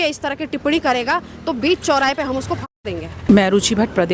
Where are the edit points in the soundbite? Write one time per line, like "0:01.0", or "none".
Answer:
none